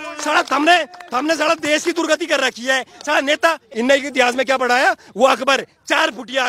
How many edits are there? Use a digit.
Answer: 1